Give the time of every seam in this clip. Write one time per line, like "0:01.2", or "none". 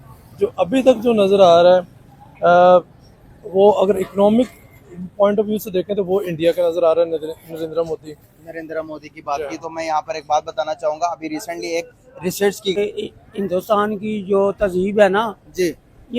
0:12.8